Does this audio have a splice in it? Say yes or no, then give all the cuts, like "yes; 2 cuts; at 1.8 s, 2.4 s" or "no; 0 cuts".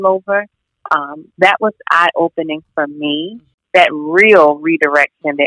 yes; 1 cut; at 3.5 s